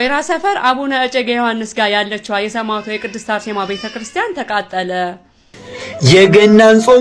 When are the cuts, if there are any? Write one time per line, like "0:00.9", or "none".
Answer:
0:05.9